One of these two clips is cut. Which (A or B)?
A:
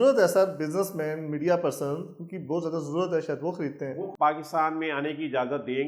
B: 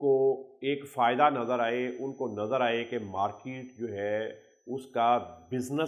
A